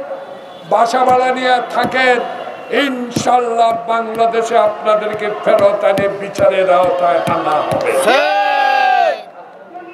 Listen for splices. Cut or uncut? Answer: uncut